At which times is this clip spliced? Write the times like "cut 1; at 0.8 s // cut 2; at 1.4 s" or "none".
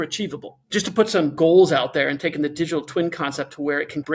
cut 1; at 1.3 s